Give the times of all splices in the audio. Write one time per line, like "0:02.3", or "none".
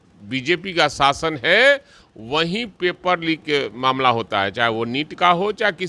none